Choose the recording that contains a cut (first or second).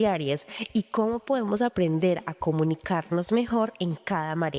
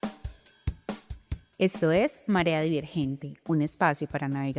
second